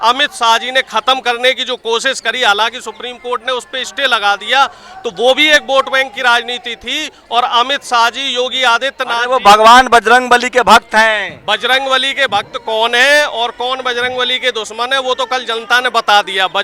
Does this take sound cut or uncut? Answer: uncut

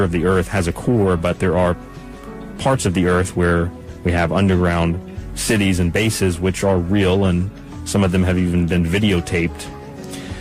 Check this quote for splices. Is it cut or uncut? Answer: cut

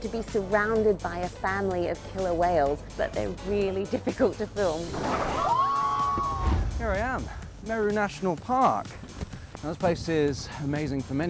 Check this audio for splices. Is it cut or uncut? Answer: cut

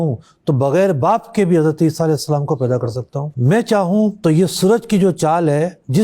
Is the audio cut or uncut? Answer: cut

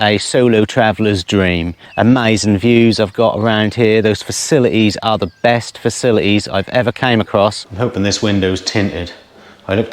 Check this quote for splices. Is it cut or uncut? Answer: cut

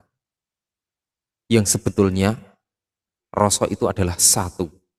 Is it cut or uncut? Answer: uncut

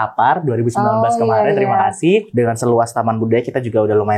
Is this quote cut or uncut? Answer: cut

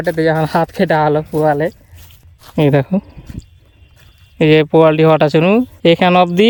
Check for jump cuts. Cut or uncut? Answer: uncut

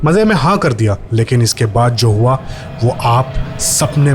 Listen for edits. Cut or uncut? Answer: cut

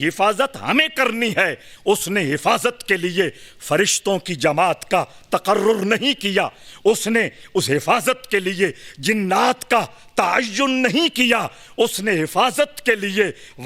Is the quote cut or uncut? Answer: uncut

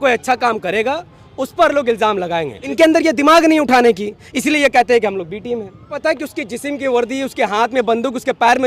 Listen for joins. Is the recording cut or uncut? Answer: cut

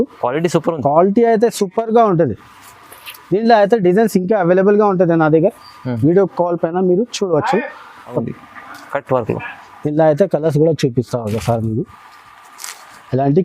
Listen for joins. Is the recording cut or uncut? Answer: cut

